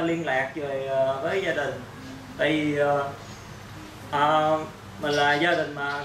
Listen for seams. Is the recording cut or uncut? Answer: uncut